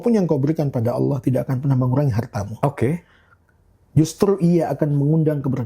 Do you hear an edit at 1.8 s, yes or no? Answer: no